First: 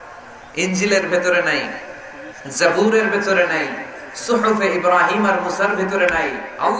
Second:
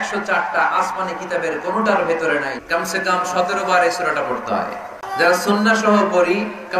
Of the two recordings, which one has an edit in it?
second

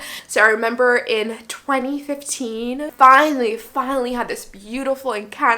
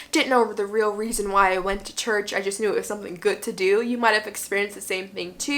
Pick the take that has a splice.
first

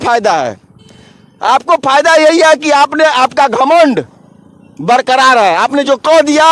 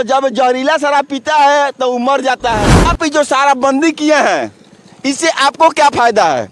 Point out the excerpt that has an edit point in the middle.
second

